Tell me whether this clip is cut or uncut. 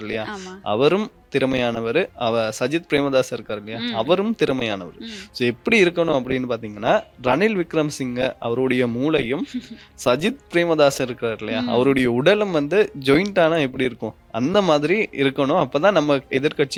uncut